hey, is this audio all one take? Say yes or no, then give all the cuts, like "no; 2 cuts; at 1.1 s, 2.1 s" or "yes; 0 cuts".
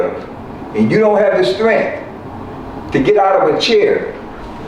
yes; 0 cuts